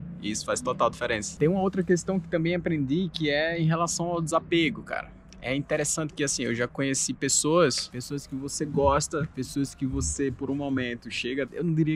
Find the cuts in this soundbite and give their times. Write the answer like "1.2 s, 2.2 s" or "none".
none